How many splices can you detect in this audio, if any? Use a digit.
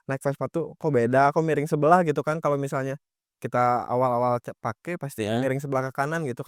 0